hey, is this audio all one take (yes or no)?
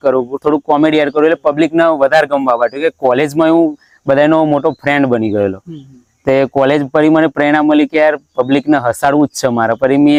yes